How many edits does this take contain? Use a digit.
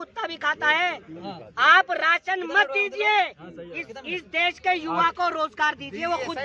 0